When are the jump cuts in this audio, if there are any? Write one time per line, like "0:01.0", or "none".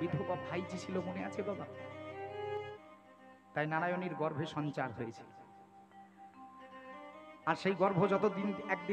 0:02.7